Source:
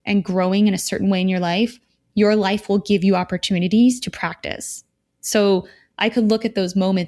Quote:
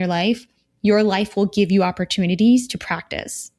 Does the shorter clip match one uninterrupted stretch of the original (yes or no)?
yes